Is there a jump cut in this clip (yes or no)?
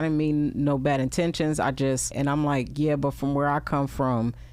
yes